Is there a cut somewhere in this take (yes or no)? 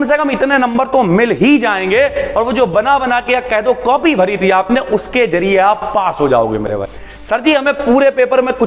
yes